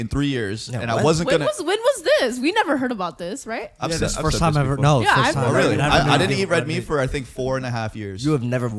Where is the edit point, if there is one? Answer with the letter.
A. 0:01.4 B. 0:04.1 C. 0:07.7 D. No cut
D